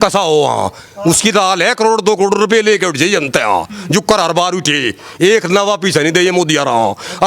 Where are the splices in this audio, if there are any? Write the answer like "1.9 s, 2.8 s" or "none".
none